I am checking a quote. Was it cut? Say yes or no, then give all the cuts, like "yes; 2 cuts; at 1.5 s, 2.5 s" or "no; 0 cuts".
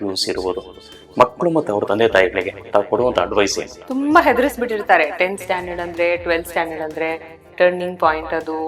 yes; 1 cut; at 3.7 s